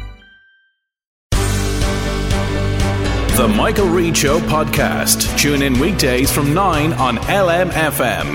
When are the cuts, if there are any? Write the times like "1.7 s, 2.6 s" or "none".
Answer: 1.4 s